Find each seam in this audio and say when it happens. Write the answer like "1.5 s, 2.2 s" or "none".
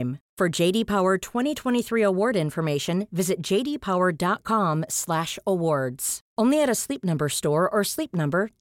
none